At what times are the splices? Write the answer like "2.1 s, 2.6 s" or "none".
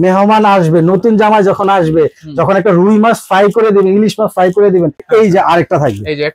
5.0 s

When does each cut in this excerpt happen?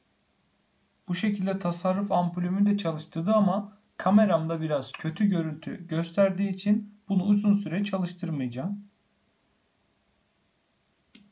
none

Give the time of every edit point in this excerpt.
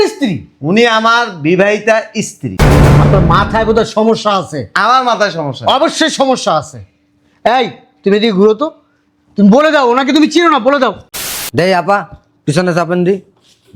11.2 s

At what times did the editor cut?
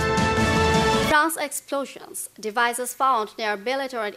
1.1 s

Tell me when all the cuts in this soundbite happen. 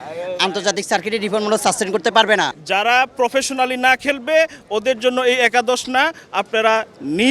2.6 s

